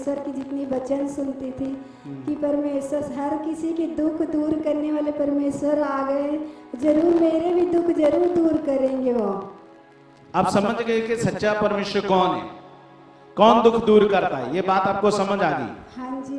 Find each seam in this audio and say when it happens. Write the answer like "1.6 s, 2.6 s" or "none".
none